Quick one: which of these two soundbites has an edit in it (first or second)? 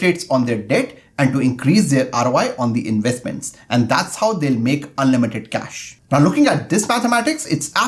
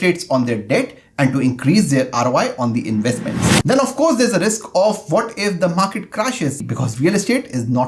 second